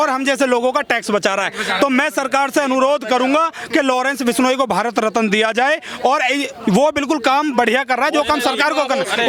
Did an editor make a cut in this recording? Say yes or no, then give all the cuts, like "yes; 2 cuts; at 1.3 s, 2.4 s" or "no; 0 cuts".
no; 0 cuts